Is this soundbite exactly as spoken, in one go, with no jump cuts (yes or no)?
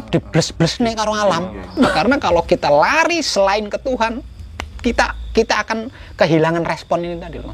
no